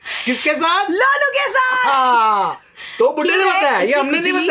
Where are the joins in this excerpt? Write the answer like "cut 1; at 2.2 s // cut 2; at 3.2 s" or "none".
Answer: none

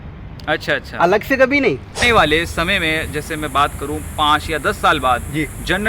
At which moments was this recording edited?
cut 1; at 2.0 s

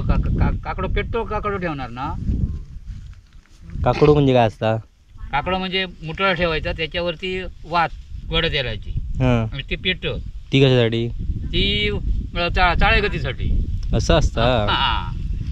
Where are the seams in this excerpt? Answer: none

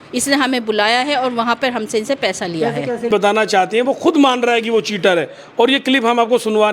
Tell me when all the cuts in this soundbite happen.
cut 1; at 3.1 s

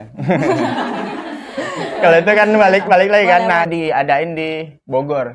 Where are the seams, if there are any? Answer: cut 1; at 3.7 s

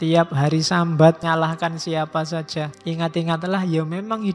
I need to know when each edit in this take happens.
cut 1; at 1.2 s // cut 2; at 2.7 s

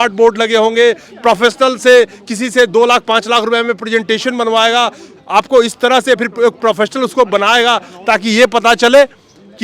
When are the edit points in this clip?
none

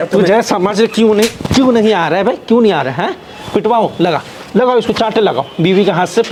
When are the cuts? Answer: none

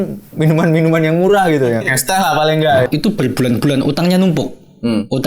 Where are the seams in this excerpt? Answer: cut 1; at 2.9 s

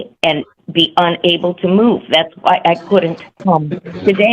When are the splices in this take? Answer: cut 1; at 3.2 s

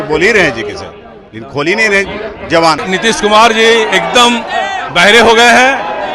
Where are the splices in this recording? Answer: cut 1; at 2.9 s

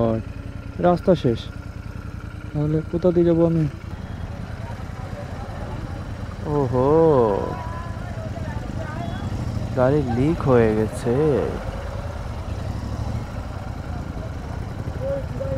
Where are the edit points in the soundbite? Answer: cut 1; at 3.8 s

